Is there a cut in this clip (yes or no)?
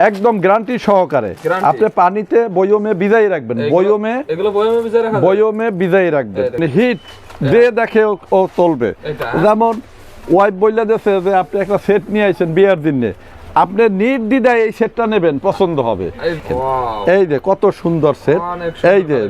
yes